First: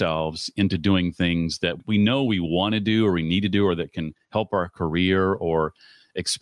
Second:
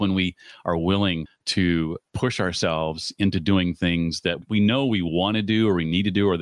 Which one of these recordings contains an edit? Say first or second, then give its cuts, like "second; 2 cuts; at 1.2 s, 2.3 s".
second; 1 cut; at 1.3 s